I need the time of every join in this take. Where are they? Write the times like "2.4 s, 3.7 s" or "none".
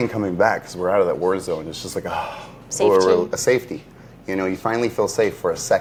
none